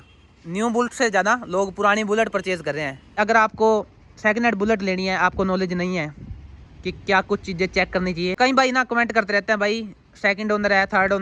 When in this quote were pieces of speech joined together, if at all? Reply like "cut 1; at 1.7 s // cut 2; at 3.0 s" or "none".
cut 1; at 3.2 s // cut 2; at 8.3 s

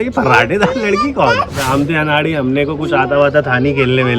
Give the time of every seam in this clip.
cut 1; at 1.6 s

